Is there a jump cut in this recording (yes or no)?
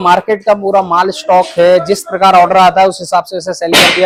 no